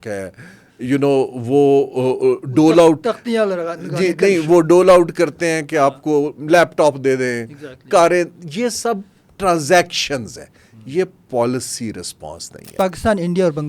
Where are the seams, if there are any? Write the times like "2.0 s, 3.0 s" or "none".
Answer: 12.7 s